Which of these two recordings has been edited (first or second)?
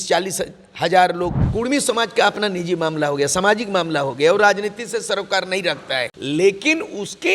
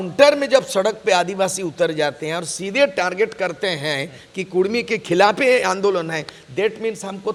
first